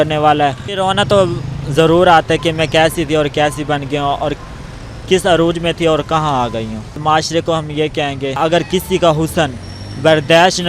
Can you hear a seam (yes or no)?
yes